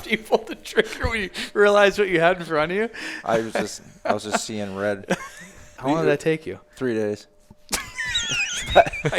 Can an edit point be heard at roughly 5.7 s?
yes; 1 cut; at 5.7 s

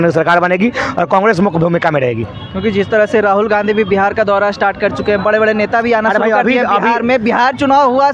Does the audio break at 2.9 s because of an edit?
no; 0 cuts

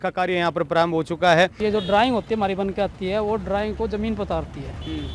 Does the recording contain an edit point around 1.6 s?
yes; 1 cut; at 1.6 s

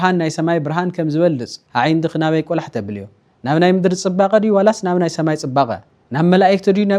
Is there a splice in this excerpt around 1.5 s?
yes; 1 cut; at 1.5 s

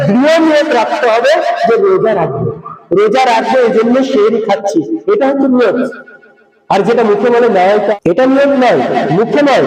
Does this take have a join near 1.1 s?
no; 1 cut; at 7.9 s

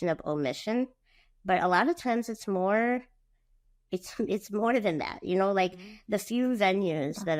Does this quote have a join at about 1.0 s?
no; 0 cuts

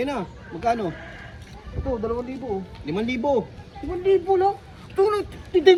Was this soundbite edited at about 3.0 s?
no; 0 cuts

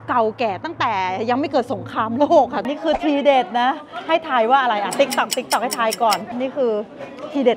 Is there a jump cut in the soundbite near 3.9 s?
no; 2 cuts; at 2.7 s, 6.3 s

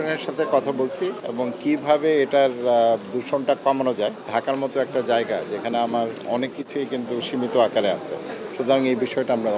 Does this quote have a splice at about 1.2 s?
yes; 2 cuts; at 1.2 s, 4.2 s

